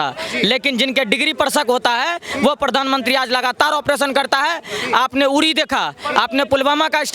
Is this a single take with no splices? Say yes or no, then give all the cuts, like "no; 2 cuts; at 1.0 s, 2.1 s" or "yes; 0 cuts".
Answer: yes; 0 cuts